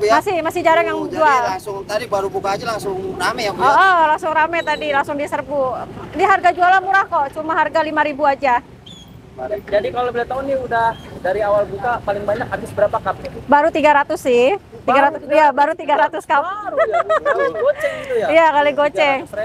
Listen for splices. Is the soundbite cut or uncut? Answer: uncut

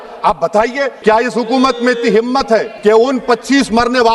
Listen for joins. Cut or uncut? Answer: cut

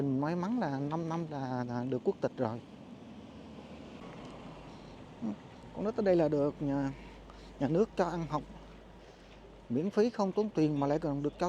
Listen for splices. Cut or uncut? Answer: cut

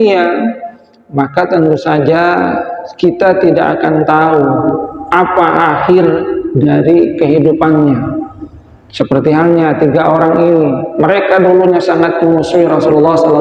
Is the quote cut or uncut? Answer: uncut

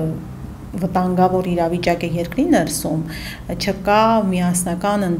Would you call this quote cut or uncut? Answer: uncut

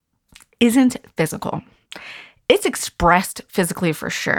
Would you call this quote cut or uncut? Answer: uncut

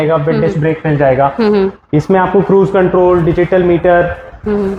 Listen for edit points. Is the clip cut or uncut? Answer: uncut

